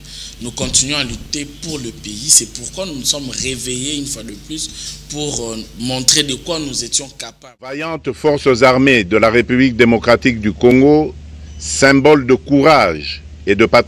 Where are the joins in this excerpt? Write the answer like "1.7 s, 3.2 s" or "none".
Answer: 7.8 s